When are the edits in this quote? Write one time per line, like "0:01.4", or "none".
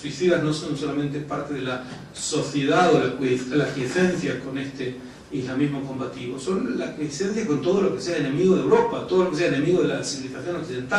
0:07.7